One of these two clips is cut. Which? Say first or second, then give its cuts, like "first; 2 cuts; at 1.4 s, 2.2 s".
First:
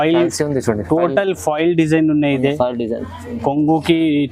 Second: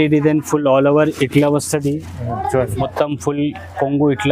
second; 1 cut; at 2.9 s